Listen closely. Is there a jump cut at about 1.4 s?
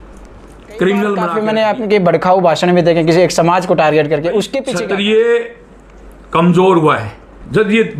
yes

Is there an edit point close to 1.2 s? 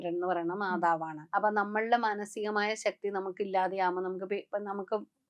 yes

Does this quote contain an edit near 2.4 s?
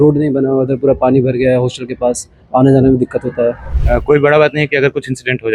no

